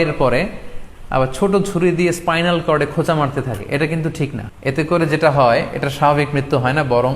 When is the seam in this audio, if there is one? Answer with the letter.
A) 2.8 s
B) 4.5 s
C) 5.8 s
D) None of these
B